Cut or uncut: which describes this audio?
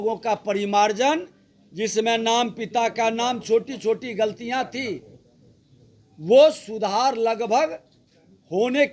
uncut